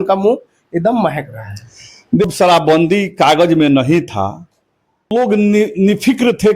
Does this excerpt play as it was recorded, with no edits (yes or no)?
no